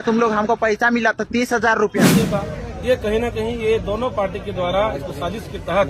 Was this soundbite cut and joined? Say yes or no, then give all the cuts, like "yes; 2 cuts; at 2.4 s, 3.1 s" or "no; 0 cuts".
yes; 1 cut; at 2.1 s